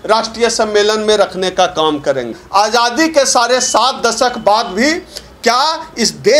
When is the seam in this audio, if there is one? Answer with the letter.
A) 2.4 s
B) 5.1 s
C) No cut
A